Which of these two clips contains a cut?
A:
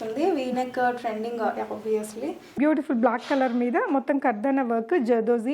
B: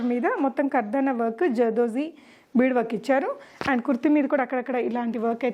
A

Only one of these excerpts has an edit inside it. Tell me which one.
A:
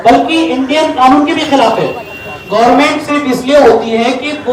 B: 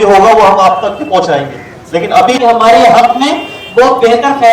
B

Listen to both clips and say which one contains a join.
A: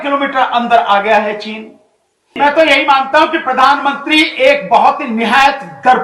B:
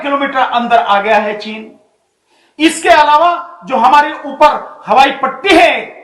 A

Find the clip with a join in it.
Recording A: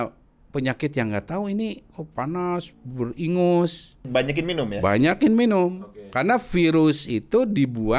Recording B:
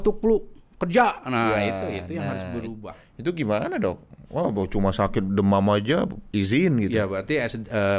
A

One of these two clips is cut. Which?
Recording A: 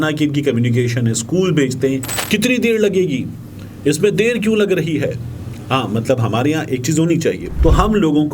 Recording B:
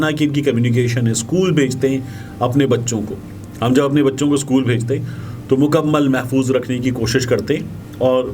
A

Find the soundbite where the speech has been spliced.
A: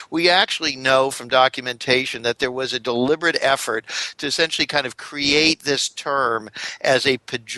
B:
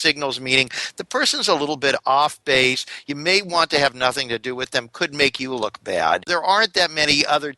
B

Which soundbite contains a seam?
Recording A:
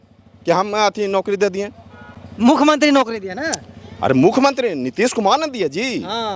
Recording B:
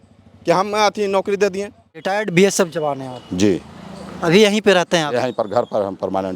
B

